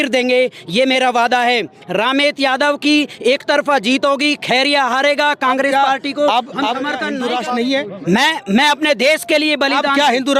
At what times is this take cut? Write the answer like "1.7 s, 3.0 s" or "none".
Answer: 7.1 s